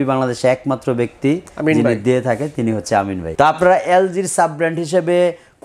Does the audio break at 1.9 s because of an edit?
no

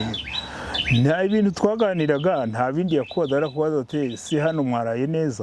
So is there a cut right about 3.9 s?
no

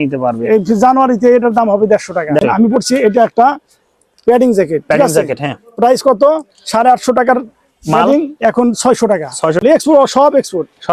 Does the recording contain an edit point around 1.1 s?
no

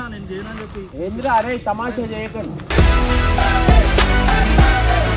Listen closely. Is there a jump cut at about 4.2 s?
no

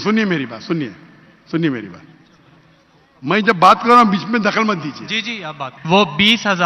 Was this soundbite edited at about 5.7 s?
yes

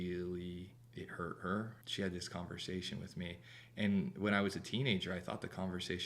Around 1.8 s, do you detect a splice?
yes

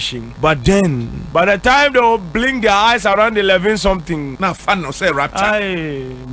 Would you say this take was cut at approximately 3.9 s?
no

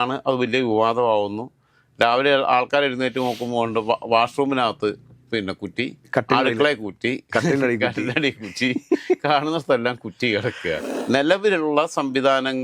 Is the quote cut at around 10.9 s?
yes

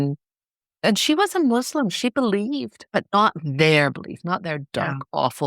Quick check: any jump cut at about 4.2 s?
no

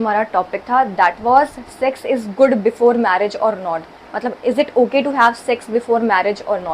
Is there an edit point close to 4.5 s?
no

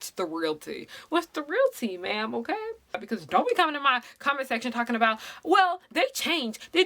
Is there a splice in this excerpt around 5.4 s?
no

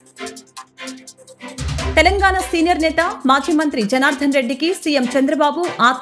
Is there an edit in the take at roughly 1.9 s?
yes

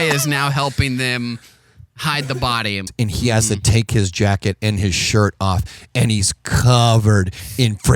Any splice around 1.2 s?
no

